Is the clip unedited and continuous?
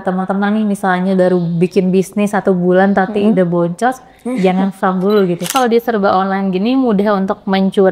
no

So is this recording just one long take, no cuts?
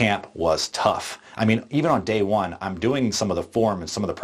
yes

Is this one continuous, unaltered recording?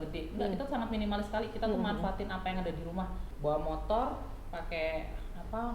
no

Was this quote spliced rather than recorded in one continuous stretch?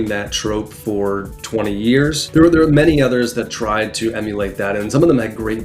yes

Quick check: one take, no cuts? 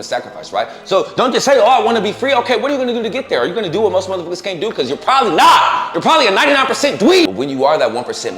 no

